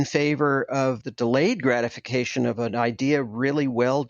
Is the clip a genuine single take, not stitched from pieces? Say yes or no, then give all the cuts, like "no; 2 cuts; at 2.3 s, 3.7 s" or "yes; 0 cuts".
no; 2 cuts; at 1.0 s, 2.6 s